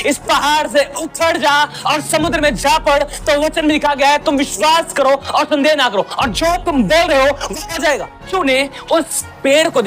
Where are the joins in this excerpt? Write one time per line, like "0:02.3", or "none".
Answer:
0:08.2